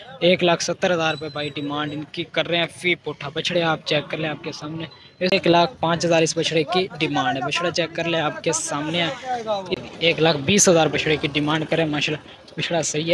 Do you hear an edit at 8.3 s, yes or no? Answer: no